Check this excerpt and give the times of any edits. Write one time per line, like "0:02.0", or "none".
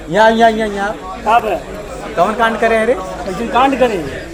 none